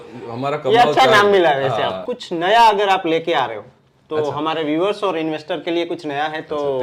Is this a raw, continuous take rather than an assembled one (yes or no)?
no